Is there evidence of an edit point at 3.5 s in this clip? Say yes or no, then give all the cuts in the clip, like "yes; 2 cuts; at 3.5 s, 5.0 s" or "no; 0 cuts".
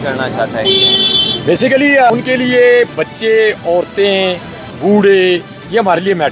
no; 1 cut; at 2.1 s